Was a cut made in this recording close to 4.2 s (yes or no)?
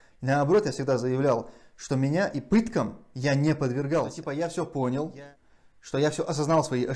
yes